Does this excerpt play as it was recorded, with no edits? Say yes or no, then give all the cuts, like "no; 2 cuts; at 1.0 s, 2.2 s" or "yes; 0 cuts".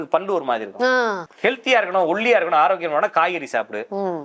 no; 1 cut; at 1.2 s